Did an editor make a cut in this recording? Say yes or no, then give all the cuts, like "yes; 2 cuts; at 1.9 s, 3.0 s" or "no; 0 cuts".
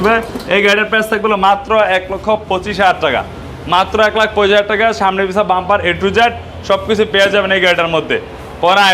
no; 0 cuts